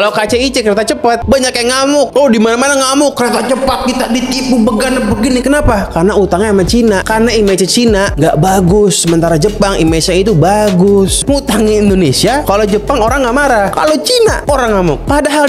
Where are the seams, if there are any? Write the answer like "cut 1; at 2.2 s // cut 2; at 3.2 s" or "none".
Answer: cut 1; at 11.2 s